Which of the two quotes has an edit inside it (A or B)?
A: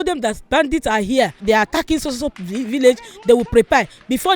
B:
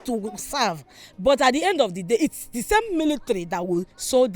A